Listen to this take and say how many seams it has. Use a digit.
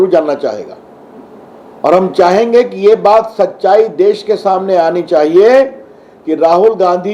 0